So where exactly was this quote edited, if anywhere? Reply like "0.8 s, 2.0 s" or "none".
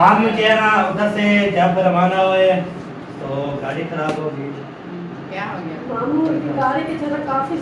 5.0 s